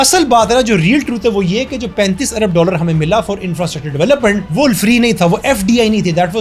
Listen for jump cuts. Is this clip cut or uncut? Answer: uncut